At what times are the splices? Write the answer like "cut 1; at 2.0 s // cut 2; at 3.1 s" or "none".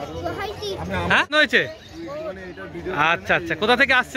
cut 1; at 1.3 s